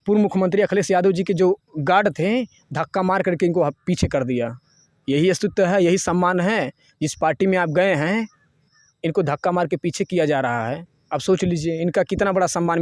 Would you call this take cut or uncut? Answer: uncut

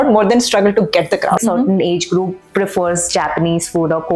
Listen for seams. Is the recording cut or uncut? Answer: cut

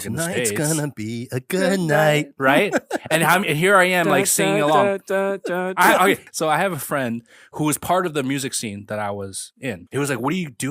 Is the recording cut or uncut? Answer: cut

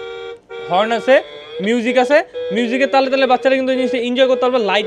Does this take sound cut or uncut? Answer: uncut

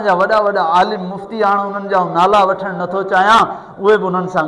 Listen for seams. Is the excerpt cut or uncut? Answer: uncut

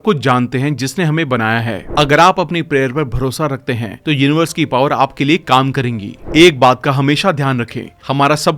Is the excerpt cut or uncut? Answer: cut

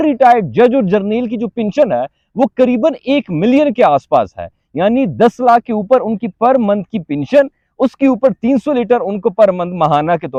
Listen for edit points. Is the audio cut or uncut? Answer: uncut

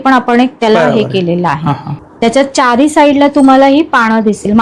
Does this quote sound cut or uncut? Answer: cut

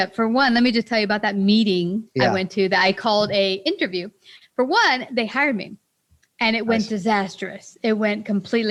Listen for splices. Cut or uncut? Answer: uncut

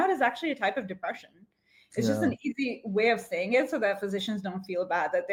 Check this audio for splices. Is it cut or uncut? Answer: uncut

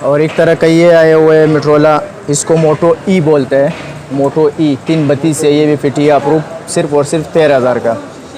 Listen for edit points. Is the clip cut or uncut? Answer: uncut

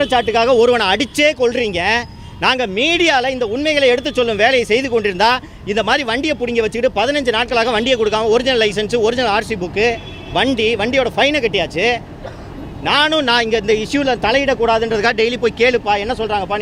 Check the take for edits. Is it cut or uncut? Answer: uncut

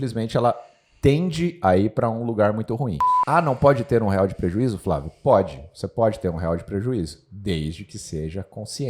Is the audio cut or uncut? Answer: cut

